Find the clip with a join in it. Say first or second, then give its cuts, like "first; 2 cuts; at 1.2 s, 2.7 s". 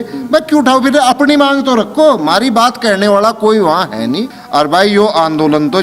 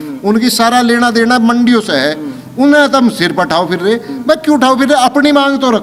first; 1 cut; at 4.3 s